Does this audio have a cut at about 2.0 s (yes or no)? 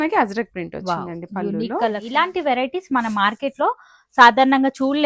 yes